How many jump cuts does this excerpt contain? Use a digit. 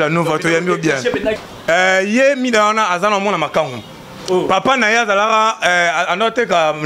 1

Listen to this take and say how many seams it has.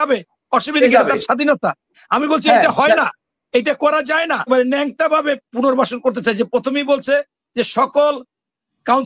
1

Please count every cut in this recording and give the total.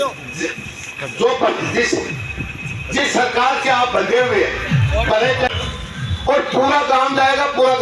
1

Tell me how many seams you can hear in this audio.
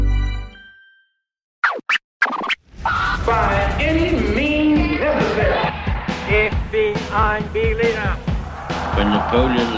1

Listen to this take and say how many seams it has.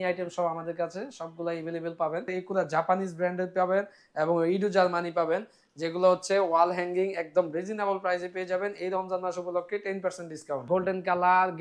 2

